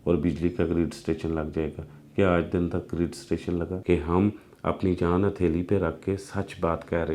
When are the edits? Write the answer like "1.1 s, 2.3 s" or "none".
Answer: 3.8 s